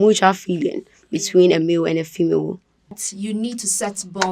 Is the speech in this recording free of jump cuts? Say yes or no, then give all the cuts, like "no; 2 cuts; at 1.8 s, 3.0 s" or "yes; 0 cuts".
no; 1 cut; at 3.0 s